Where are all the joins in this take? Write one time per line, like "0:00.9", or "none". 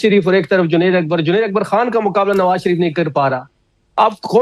none